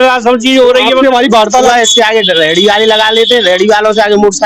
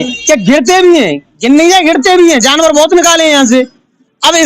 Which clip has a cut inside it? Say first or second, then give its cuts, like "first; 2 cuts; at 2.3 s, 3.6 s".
first; 1 cut; at 1.6 s